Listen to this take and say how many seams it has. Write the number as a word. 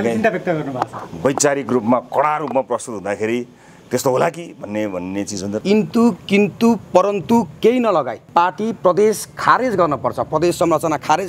one